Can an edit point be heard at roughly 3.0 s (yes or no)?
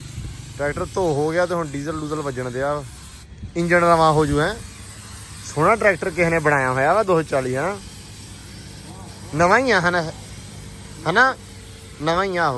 no